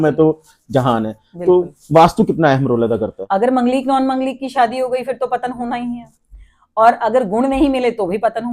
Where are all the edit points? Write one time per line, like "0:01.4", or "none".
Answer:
0:03.1